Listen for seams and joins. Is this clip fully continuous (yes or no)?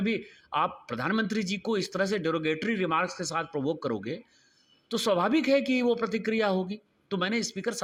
yes